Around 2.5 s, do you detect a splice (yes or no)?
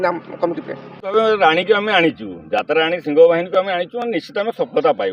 no